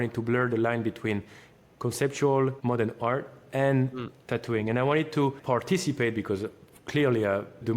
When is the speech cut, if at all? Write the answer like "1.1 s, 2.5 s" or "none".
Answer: 2.6 s, 5.4 s